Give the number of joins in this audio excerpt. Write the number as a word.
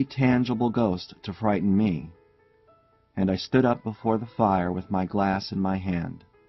one